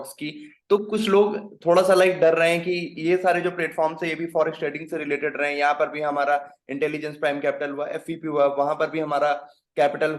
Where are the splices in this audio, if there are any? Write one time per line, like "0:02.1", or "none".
none